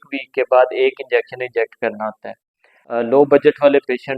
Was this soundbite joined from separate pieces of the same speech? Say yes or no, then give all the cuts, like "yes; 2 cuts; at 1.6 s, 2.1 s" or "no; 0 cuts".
yes; 1 cut; at 2.8 s